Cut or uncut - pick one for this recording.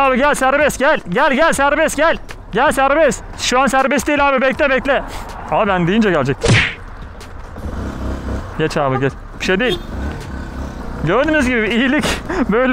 uncut